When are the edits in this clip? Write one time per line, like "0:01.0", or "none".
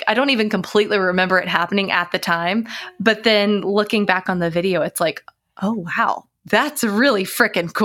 none